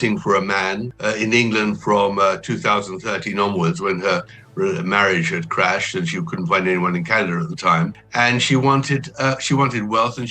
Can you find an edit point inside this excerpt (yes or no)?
yes